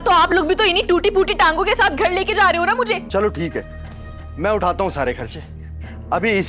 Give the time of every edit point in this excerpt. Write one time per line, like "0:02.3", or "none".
0:03.0

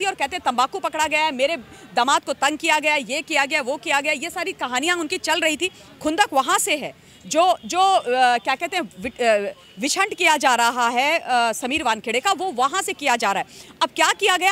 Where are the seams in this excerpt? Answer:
none

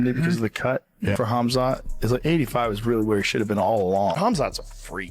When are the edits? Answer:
0:04.2

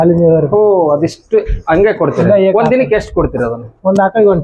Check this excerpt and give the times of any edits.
none

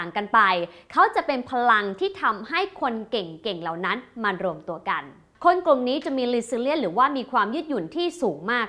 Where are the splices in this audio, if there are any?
0:05.3

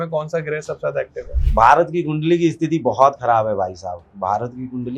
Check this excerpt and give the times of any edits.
0:04.1

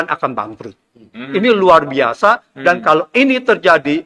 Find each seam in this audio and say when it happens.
0:01.2

